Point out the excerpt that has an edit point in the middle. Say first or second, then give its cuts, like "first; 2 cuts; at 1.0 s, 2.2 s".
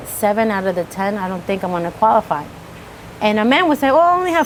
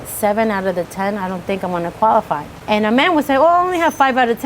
second; 1 cut; at 2.5 s